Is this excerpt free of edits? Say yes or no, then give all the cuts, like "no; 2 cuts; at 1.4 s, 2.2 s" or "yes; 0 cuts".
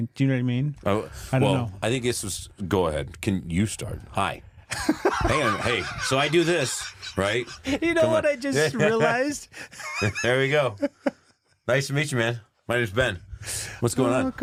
yes; 0 cuts